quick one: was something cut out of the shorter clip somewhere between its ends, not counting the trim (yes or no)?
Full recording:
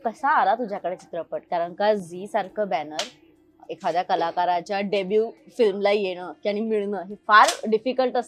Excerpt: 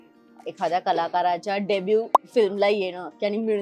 no